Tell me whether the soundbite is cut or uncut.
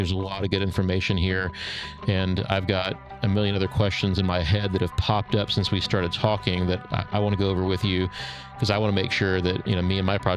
uncut